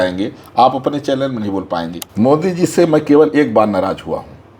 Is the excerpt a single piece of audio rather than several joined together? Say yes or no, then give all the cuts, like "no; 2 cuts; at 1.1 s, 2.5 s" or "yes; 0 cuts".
no; 1 cut; at 2.0 s